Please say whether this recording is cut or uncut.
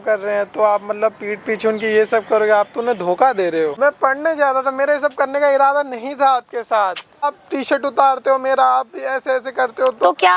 cut